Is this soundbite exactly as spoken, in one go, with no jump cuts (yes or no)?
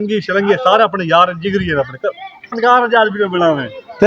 no